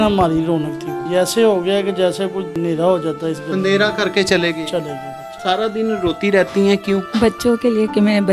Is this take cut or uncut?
cut